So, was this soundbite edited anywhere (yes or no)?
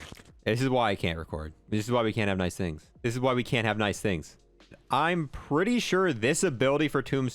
yes